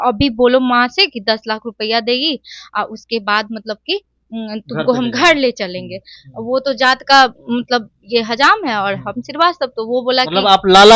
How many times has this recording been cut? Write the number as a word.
one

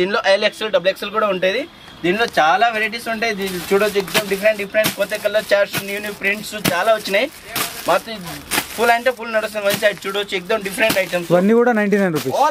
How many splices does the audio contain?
zero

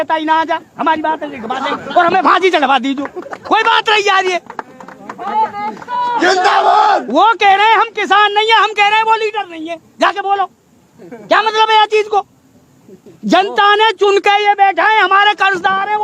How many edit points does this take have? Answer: zero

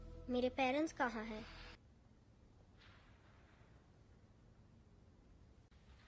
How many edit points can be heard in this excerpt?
one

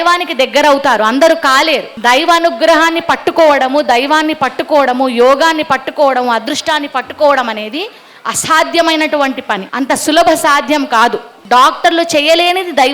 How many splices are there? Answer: three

